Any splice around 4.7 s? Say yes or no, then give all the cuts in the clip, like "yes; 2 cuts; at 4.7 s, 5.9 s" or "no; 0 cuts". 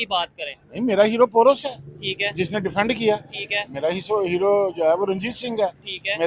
no; 0 cuts